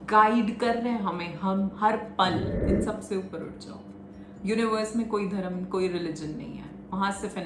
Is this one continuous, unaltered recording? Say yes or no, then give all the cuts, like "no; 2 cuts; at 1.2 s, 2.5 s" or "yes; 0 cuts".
no; 1 cut; at 2.6 s